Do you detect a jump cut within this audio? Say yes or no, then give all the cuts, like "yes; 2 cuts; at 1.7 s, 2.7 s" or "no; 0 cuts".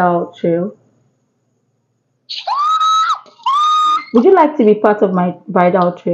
yes; 2 cuts; at 1.8 s, 3.9 s